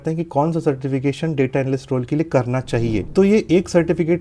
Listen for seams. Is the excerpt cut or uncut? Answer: cut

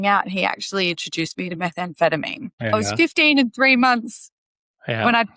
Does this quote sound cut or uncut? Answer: cut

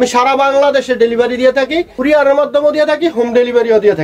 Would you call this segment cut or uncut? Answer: cut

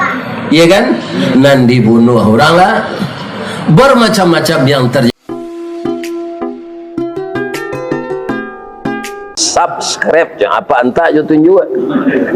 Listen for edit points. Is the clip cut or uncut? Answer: cut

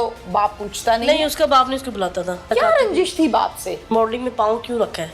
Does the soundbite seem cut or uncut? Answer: cut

